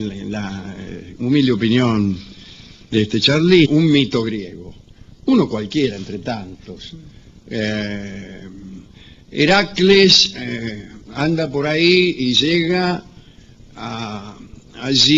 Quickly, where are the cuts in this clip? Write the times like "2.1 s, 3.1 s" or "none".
none